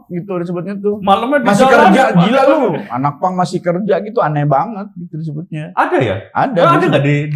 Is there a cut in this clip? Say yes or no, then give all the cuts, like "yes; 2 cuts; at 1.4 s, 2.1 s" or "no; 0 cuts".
no; 0 cuts